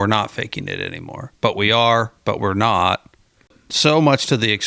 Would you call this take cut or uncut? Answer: cut